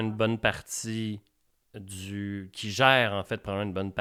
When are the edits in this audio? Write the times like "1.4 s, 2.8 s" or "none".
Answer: none